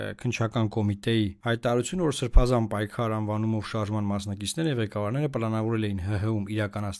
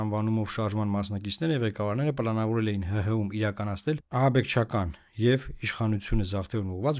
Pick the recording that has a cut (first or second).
first